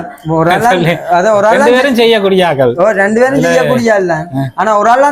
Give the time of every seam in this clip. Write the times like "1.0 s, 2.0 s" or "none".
none